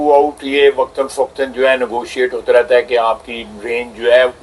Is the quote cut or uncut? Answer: uncut